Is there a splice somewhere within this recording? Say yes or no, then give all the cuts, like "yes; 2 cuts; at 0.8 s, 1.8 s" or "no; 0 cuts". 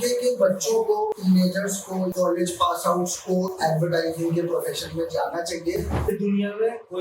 yes; 3 cuts; at 1.2 s, 2.1 s, 6.0 s